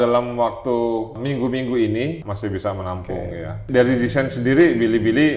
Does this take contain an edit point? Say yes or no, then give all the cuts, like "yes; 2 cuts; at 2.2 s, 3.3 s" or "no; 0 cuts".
yes; 3 cuts; at 1.2 s, 2.3 s, 3.6 s